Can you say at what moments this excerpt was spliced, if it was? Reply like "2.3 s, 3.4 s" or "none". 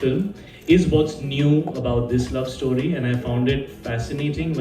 none